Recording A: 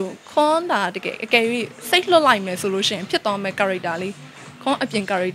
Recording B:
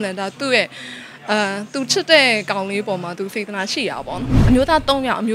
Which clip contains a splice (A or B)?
B